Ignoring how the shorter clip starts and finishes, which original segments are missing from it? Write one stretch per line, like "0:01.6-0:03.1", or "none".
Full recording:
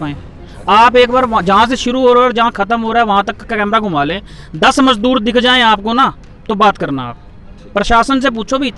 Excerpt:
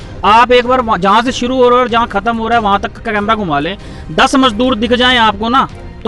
none